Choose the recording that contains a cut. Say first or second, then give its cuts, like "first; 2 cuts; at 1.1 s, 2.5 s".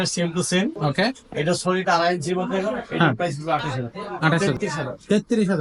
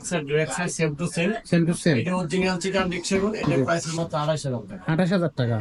first; 1 cut; at 4.4 s